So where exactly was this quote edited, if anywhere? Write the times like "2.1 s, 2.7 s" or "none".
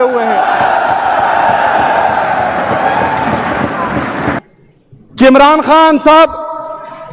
4.4 s